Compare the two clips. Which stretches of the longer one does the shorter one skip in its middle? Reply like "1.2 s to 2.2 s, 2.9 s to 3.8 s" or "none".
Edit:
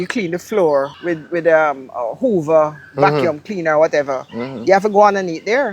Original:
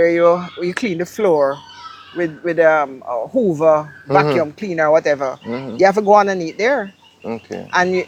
1.6 s to 2.1 s